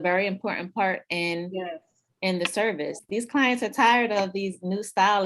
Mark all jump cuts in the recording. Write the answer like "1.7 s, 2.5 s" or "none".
3.0 s